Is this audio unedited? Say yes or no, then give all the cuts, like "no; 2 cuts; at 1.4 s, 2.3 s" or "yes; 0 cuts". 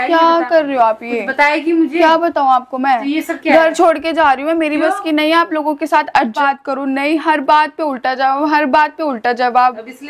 no; 1 cut; at 6.4 s